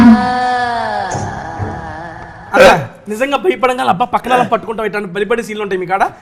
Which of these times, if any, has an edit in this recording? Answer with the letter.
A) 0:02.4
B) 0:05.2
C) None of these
A